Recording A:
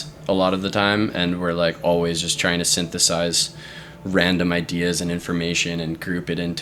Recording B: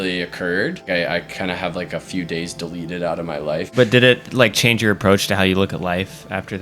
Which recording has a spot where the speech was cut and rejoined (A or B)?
B